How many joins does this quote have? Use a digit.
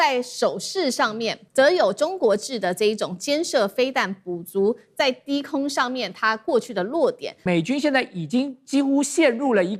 2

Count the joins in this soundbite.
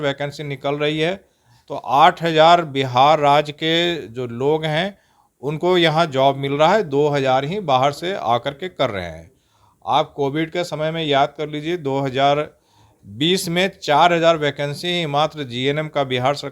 0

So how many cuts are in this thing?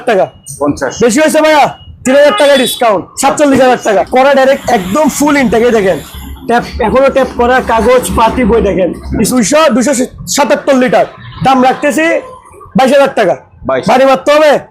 2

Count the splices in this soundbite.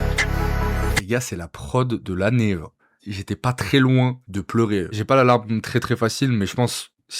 2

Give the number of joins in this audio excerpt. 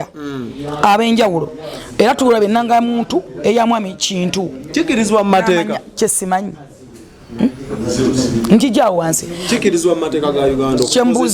0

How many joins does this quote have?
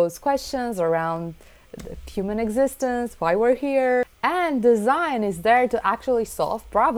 1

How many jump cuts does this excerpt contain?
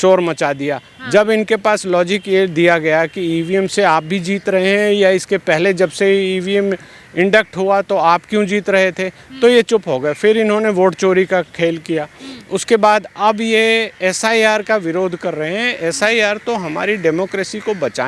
0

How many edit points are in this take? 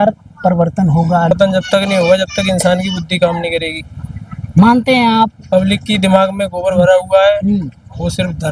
1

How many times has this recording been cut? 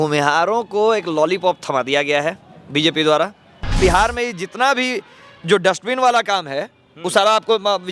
1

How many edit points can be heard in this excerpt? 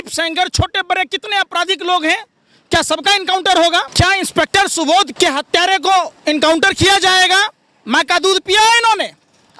2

